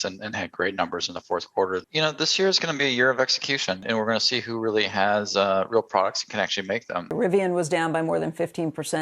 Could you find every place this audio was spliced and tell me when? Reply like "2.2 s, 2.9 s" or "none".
1.8 s, 3.8 s, 7.1 s